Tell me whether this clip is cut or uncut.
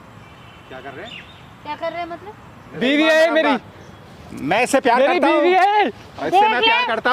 cut